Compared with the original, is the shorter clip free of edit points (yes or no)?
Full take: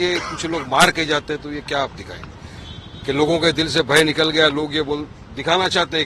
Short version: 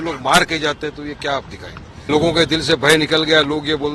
no